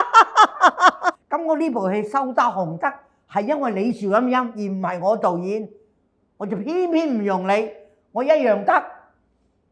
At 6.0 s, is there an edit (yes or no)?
no